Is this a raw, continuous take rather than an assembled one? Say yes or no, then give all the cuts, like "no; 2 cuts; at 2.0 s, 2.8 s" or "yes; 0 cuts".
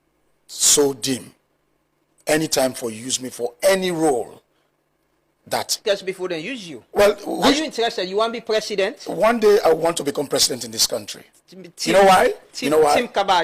no; 1 cut; at 5.7 s